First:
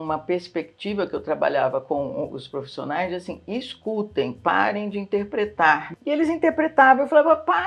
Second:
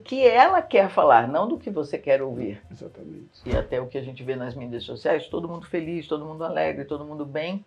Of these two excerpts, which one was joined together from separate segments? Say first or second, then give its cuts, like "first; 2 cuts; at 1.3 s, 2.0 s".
second; 1 cut; at 3.4 s